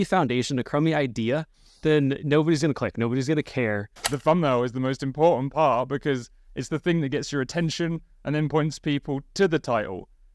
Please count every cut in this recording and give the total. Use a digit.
1